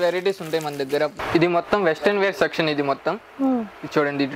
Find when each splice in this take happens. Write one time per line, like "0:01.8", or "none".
0:01.2